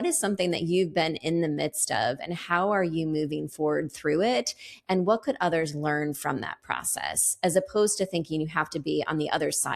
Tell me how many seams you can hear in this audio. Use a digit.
0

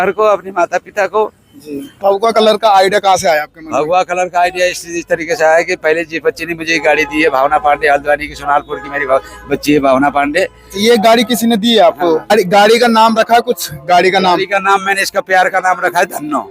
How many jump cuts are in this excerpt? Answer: 2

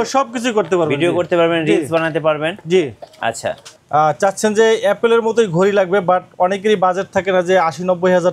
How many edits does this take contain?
1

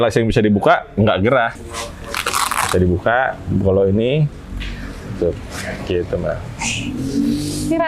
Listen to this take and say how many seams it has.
1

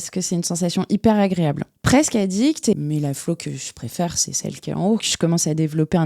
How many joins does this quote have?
3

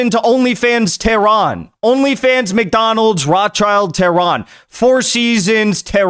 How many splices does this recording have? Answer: 1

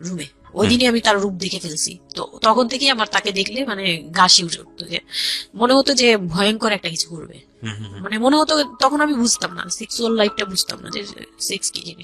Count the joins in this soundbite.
0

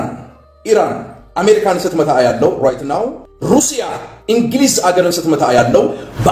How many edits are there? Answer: 1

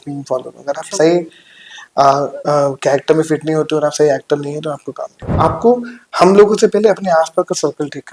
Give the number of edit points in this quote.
1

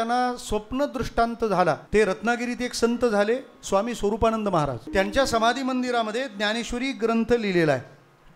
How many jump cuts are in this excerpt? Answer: 2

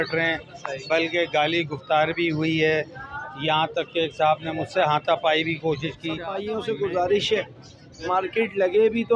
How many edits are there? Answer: 1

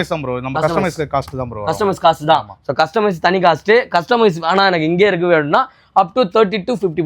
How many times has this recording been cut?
0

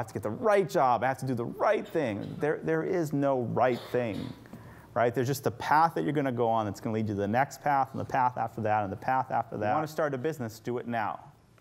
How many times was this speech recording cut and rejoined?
1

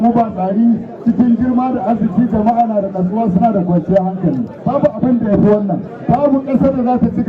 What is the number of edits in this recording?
2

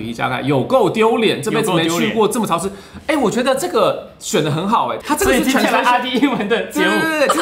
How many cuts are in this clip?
0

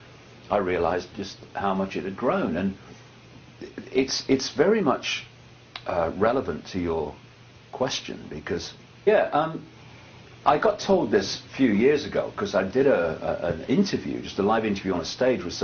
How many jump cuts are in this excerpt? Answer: 0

